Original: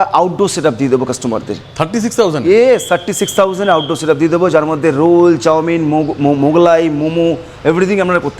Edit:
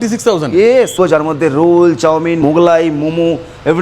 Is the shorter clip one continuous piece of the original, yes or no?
no